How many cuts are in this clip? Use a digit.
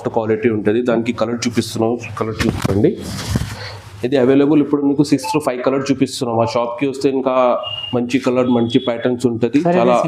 0